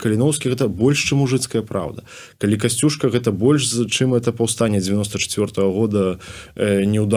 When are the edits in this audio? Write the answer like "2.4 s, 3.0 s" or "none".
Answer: none